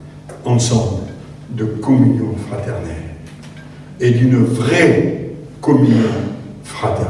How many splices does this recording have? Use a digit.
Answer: 0